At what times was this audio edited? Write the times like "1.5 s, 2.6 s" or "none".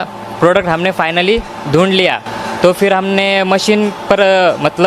none